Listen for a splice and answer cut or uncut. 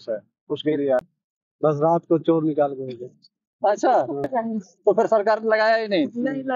cut